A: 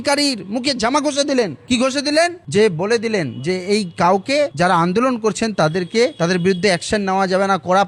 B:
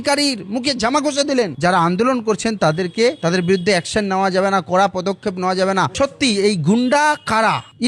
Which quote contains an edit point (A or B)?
B